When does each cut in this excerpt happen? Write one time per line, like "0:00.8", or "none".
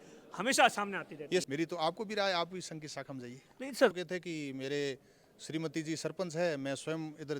0:01.5
0:03.9